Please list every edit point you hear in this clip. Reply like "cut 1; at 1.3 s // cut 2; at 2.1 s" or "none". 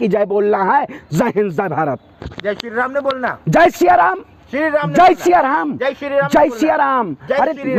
none